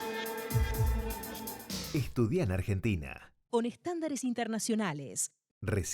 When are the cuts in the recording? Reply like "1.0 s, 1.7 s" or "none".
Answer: 1.5 s

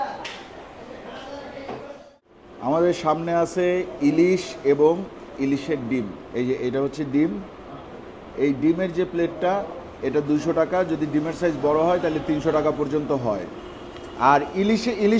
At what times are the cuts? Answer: none

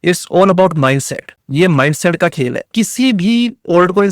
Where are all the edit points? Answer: 2.6 s

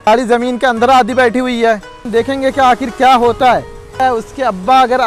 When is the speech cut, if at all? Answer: 2.0 s, 4.0 s

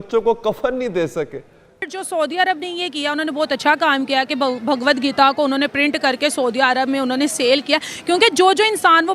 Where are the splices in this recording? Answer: 1.9 s

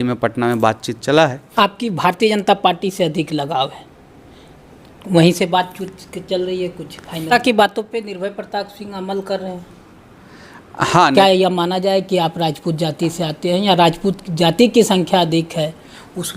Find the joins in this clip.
1.4 s, 7.3 s, 11.1 s

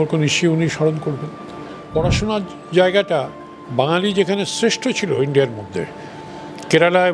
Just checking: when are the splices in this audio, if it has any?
1.8 s

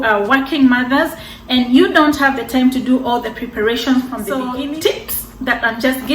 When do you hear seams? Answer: 4.5 s

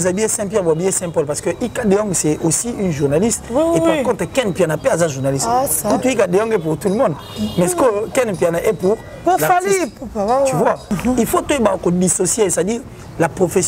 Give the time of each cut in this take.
10.9 s

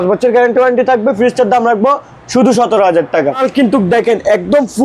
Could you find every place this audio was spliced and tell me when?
3.4 s

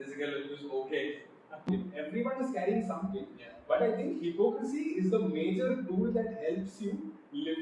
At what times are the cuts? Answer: 1.7 s

